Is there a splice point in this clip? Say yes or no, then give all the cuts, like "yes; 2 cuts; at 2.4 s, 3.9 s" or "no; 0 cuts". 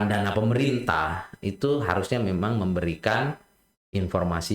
no; 0 cuts